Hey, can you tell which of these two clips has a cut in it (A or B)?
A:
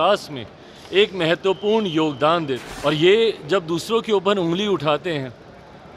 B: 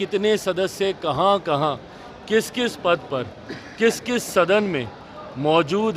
A